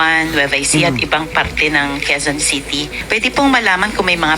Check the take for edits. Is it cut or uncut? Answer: cut